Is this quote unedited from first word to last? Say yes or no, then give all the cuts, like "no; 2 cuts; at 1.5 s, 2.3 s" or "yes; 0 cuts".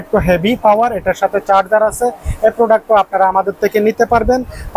yes; 0 cuts